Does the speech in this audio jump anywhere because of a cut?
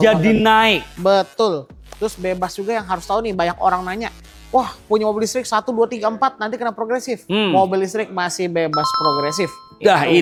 no; 0 cuts

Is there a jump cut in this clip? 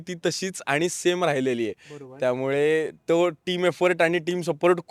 no; 0 cuts

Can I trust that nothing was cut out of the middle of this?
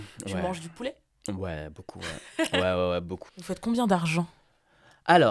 no; 1 cut; at 3.2 s

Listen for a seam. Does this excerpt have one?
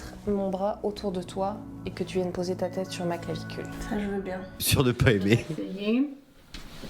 yes; 1 cut; at 4.6 s

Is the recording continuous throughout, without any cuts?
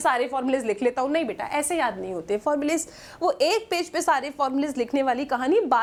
yes; 0 cuts

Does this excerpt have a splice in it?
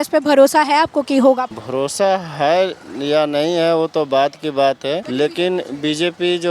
yes; 2 cuts; at 1.6 s, 5.1 s

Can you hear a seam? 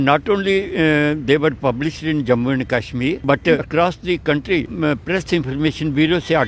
yes; 2 cuts; at 3.6 s, 4.7 s

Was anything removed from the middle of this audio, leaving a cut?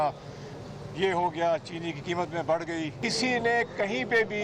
yes; 1 cut; at 3.0 s

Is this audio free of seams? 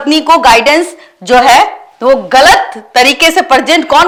yes; 0 cuts

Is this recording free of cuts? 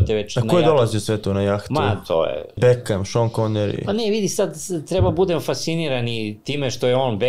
no; 1 cut; at 2.5 s

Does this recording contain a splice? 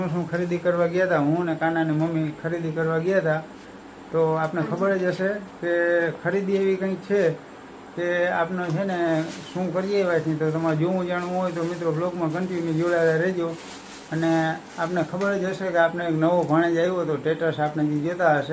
no; 0 cuts

